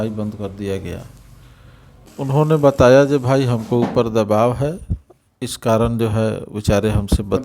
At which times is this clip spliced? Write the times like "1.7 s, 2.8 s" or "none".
2.0 s